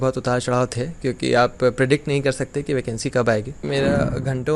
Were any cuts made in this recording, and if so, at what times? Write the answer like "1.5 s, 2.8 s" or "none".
3.6 s